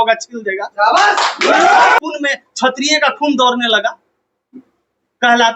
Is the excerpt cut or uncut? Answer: cut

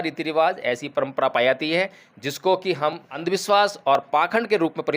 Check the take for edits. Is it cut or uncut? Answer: cut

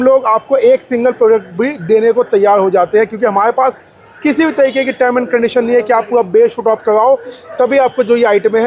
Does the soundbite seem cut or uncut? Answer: uncut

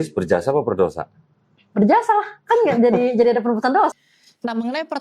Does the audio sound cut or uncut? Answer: uncut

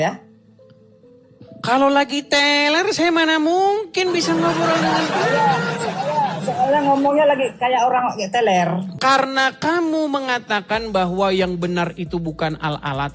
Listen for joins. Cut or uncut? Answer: cut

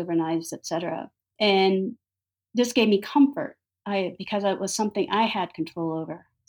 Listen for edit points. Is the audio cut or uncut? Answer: cut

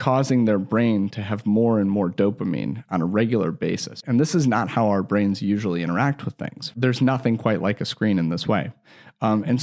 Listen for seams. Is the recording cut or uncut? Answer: cut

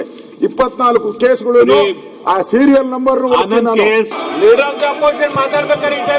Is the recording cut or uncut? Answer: cut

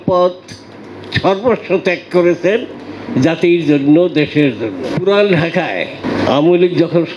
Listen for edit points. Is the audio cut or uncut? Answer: cut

